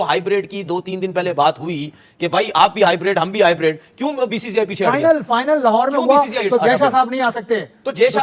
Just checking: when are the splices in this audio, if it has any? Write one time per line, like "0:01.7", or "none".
none